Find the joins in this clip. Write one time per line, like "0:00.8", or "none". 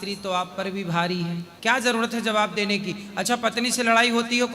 0:01.5